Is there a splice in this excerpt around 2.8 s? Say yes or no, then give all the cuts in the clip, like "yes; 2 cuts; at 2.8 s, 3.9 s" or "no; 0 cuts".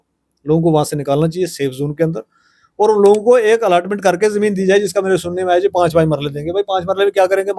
no; 0 cuts